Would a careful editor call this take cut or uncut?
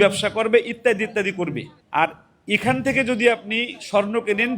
cut